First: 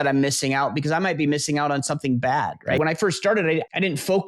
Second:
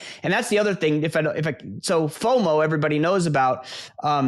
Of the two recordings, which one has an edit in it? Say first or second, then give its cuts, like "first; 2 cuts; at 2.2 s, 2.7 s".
first; 1 cut; at 2.8 s